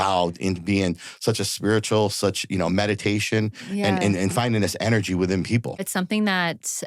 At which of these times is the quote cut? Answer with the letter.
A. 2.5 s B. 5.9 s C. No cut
B